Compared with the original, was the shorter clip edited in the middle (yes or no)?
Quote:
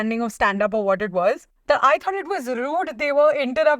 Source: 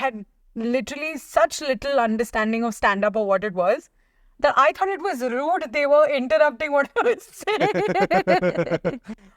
yes